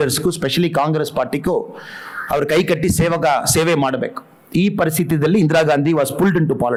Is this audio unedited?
yes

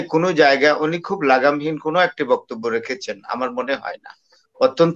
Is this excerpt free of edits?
yes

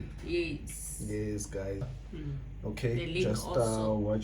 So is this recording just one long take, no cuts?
no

